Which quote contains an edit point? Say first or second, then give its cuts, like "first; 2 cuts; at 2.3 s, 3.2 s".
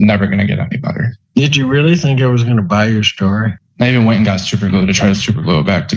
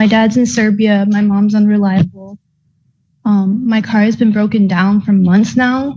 first; 2 cuts; at 1.1 s, 3.6 s